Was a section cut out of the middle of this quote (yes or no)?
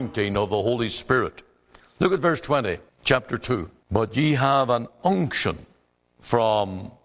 yes